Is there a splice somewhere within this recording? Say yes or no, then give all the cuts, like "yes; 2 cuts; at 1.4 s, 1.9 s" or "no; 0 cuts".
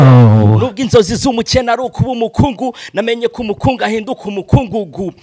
no; 0 cuts